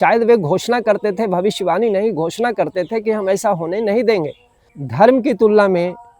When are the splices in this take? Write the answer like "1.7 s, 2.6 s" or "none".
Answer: 4.8 s